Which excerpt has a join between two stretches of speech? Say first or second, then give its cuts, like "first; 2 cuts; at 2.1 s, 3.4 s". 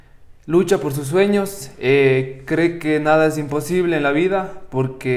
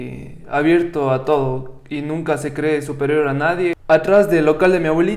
second; 1 cut; at 3.8 s